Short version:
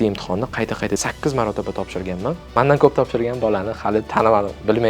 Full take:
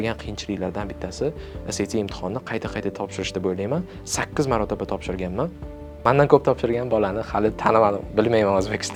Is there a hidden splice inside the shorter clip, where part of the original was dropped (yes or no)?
yes